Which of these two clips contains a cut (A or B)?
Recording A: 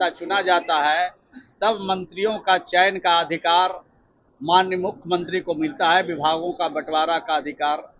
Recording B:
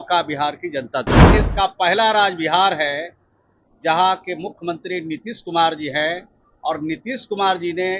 B